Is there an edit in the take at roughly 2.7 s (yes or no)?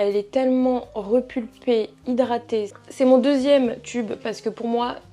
yes